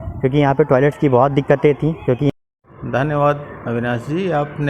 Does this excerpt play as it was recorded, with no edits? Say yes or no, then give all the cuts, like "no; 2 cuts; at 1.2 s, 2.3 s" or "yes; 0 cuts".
no; 1 cut; at 2.3 s